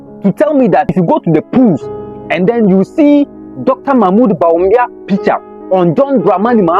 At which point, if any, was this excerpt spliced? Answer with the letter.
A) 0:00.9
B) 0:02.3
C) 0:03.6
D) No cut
A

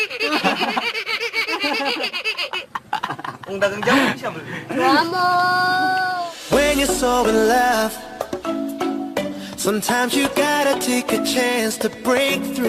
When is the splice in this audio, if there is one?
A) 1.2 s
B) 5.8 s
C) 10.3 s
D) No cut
A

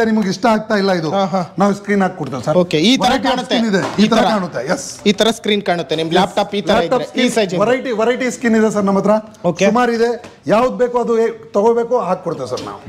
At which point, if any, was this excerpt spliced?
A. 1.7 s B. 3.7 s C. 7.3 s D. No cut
D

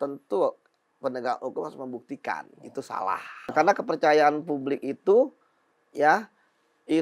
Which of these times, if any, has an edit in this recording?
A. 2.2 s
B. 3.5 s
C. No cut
B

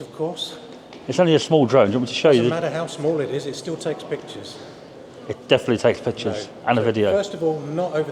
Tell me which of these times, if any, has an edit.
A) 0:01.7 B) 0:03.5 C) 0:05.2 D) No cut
D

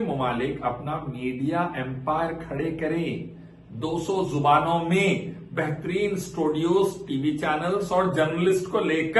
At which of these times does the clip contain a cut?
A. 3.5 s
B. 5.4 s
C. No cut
C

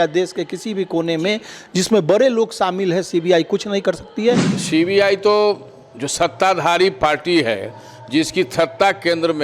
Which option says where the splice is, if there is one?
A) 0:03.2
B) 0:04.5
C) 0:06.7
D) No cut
B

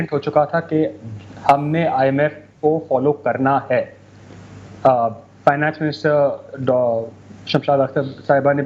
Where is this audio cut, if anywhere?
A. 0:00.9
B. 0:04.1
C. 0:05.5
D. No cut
D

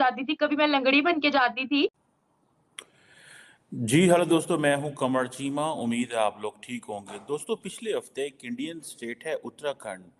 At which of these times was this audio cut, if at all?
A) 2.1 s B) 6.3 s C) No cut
A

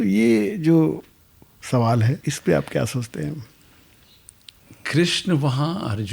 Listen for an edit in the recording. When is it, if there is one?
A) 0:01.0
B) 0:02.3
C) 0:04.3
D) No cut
B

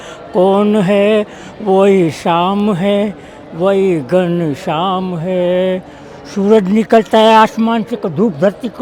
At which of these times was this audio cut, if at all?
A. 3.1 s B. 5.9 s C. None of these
C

